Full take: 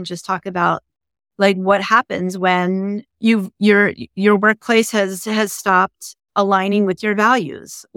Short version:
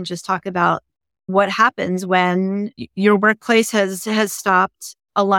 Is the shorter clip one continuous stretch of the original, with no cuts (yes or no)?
no